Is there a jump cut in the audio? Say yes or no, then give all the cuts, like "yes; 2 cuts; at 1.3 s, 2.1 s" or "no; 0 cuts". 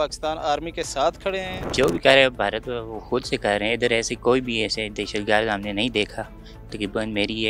yes; 1 cut; at 1.6 s